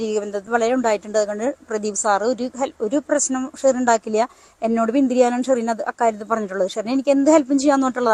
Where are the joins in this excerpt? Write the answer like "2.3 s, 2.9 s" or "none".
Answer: none